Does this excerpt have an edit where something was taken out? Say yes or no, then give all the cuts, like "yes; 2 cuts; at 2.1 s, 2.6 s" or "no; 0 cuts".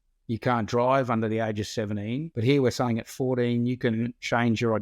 yes; 1 cut; at 2.3 s